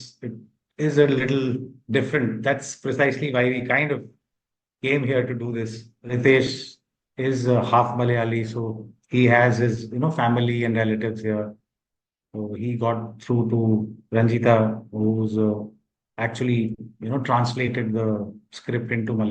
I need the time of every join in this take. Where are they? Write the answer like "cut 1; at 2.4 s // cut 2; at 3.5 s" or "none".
cut 1; at 6.0 s